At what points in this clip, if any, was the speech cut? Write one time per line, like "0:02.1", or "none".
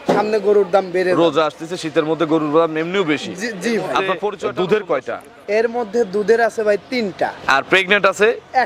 0:04.4